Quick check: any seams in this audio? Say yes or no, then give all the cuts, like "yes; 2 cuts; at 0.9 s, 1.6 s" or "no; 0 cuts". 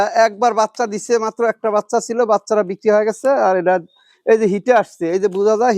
no; 0 cuts